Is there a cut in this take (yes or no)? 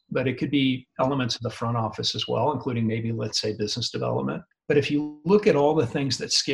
yes